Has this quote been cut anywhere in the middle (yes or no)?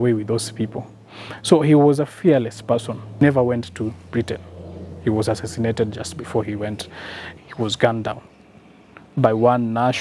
yes